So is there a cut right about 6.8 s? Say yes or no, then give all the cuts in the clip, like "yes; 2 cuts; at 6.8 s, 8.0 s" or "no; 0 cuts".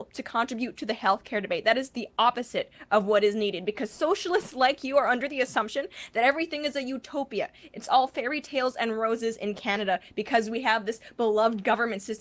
no; 2 cuts; at 10.1 s, 10.8 s